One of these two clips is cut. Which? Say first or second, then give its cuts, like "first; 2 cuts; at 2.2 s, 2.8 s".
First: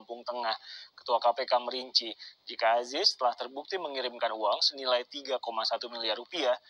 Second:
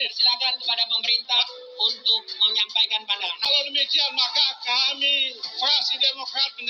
second; 1 cut; at 3.5 s